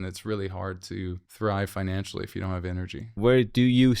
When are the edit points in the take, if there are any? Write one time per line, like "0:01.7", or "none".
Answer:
0:01.2
0:03.1